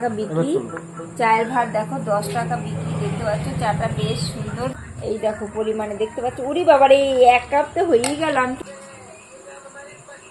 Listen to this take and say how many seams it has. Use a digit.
2